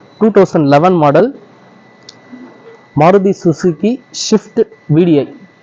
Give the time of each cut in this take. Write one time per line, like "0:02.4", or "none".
none